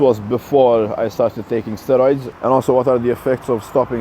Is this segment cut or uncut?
cut